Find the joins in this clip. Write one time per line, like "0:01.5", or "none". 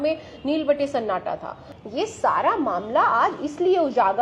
0:01.7